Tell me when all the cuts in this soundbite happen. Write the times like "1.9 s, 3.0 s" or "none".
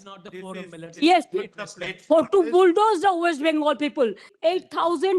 4.3 s